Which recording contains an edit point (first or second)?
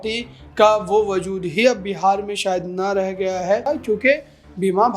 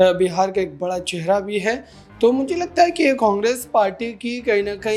first